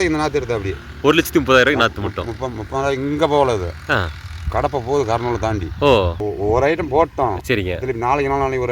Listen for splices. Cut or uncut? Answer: cut